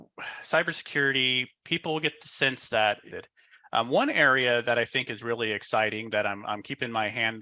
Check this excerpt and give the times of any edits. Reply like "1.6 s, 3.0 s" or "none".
3.2 s